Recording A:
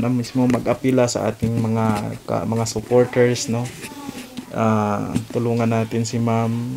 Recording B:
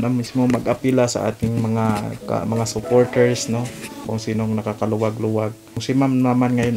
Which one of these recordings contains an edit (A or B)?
B